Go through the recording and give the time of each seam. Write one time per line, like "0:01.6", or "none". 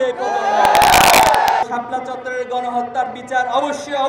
0:01.6